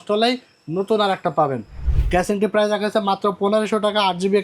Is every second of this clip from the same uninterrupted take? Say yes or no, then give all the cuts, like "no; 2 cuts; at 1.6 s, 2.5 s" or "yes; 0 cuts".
no; 1 cut; at 1.9 s